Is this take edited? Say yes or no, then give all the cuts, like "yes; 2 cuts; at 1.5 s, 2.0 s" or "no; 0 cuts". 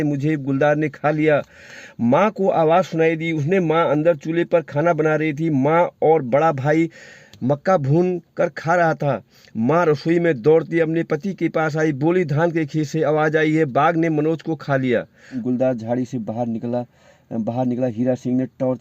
yes; 1 cut; at 15.3 s